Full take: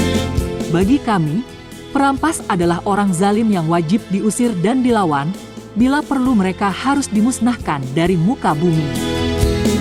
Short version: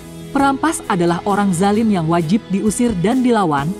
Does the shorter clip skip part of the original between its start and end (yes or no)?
no